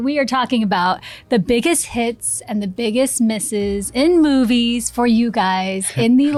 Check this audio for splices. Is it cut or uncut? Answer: uncut